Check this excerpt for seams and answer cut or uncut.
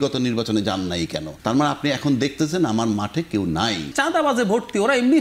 cut